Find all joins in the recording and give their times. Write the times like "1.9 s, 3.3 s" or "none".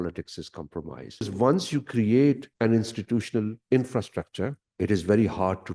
1.3 s, 2.5 s, 4.6 s